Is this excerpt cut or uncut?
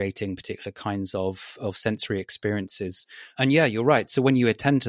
cut